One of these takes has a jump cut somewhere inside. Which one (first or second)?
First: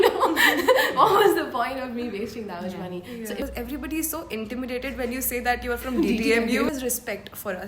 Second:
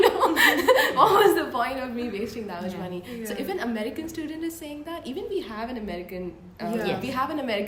first